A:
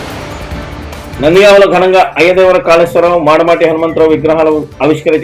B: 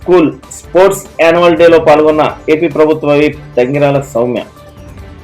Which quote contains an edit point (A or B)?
A